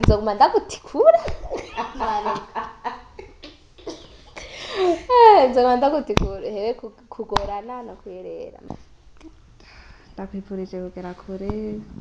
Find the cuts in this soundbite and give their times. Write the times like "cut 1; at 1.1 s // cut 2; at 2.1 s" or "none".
cut 1; at 8.7 s